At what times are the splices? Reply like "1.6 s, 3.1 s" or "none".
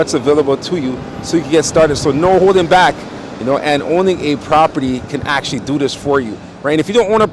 none